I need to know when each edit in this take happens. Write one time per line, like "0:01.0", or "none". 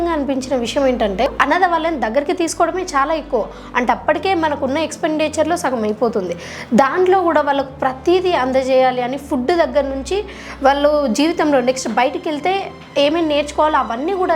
0:01.3